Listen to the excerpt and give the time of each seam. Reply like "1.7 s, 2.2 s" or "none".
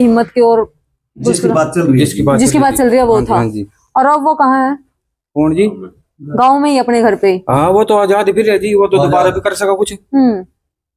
none